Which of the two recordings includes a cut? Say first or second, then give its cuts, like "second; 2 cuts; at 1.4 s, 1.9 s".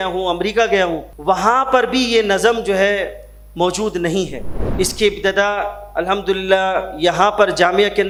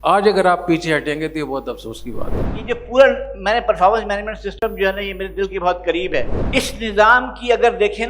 second; 2 cuts; at 2.5 s, 6.4 s